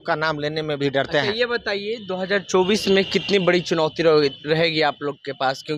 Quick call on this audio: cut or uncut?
uncut